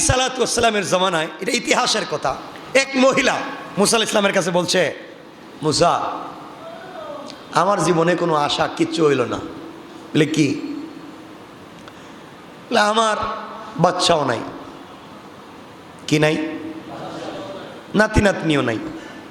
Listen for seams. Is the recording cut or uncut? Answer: cut